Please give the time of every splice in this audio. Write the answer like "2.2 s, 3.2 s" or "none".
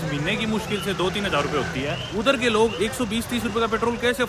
2.0 s, 2.7 s